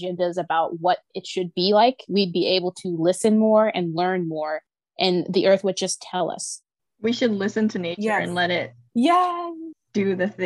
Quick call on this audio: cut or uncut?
uncut